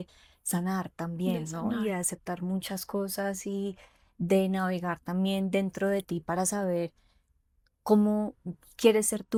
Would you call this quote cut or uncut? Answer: uncut